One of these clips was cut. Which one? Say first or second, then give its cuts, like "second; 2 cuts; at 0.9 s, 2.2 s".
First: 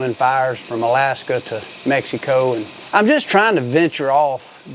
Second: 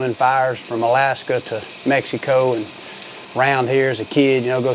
first; 1 cut; at 2.7 s